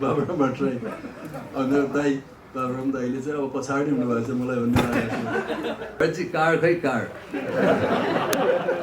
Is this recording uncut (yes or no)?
no